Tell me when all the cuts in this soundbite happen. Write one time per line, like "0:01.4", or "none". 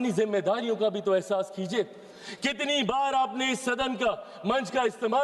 none